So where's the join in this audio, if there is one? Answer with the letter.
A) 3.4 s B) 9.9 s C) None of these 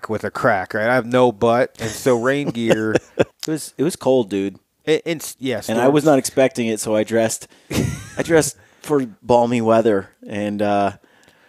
A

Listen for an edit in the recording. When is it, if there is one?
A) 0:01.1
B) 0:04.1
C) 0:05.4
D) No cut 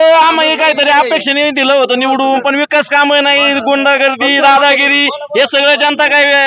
D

